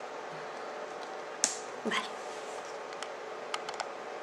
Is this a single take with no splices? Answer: no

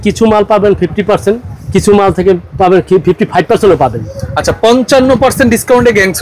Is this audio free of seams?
yes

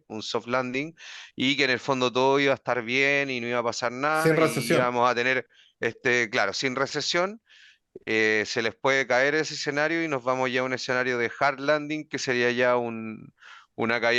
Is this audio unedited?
yes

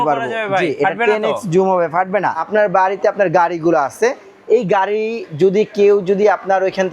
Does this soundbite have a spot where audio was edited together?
yes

